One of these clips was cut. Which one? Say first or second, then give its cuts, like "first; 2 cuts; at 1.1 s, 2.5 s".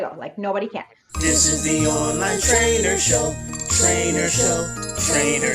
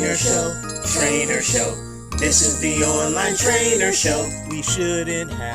first; 1 cut; at 1.0 s